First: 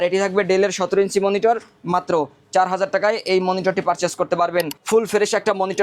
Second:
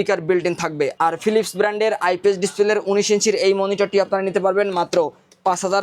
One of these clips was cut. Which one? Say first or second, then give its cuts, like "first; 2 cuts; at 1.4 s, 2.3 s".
first; 1 cut; at 4.8 s